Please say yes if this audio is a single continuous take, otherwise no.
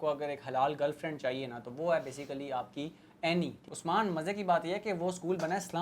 no